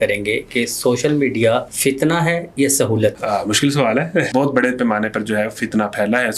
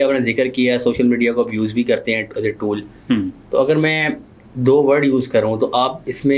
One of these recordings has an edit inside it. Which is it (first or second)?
first